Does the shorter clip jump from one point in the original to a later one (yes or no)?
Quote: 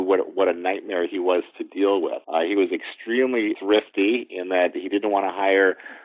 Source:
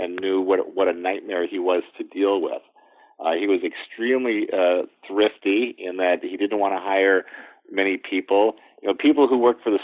yes